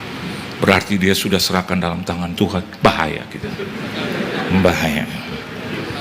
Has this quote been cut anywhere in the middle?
no; 0 cuts

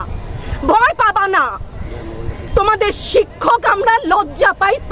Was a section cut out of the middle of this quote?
no; 0 cuts

